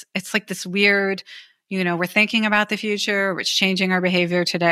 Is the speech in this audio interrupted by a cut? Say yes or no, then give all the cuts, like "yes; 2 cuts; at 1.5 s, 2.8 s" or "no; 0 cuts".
no; 0 cuts